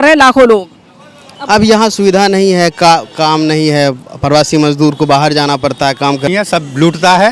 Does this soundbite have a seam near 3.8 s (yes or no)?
no